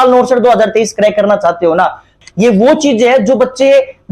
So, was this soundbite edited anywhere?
yes; 1 cut; at 2.2 s

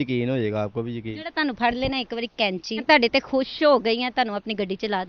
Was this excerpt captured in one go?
no; 1 cut; at 2.8 s

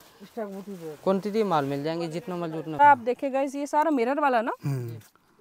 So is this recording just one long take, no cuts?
no; 1 cut; at 2.8 s

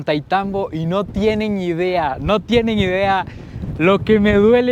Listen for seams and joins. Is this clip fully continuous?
yes; 0 cuts

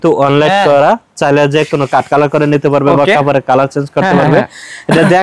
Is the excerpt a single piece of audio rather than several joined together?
yes; 0 cuts

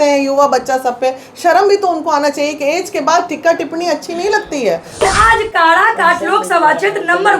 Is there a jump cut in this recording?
yes; 1 cut; at 5.0 s

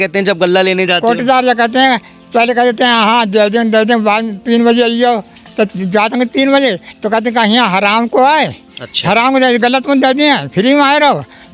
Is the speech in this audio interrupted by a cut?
no; 0 cuts

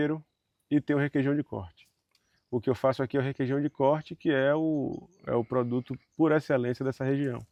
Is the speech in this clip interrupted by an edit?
no; 0 cuts

